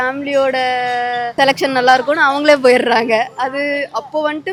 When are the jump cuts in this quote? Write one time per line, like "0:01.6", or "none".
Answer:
none